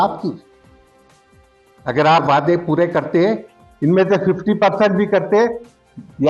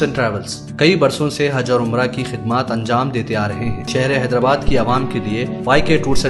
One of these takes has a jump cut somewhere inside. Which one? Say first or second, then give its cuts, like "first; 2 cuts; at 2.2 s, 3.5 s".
second; 1 cut; at 3.8 s